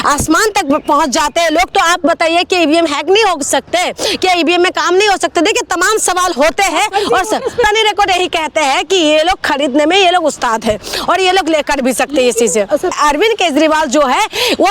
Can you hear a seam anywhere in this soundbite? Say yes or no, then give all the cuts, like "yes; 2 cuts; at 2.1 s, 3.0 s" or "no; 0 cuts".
yes; 2 cuts; at 7.6 s, 12.9 s